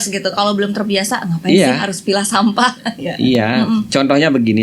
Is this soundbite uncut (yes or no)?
yes